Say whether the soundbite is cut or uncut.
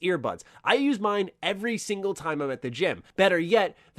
cut